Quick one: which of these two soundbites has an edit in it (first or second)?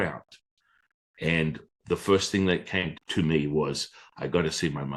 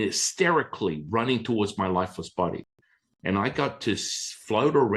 first